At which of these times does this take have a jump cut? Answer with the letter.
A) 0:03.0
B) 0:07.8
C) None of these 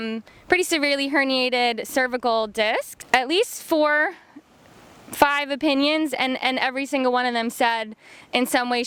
A